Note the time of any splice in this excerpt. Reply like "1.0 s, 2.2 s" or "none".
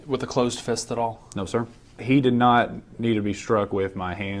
2.0 s